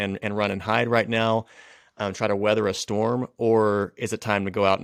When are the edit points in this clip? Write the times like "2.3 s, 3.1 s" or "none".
none